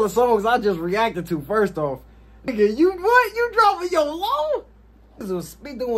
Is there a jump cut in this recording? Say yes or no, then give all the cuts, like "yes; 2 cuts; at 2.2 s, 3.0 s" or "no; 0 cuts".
yes; 2 cuts; at 2.5 s, 5.2 s